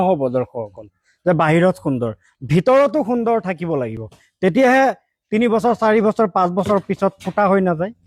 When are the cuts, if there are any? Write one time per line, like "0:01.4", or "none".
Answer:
none